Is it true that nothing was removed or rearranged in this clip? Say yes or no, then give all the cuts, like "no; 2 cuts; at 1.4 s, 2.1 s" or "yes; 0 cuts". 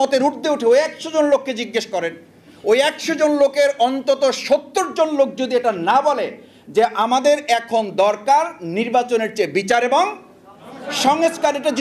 yes; 0 cuts